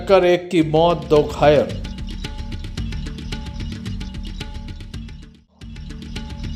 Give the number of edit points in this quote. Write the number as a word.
zero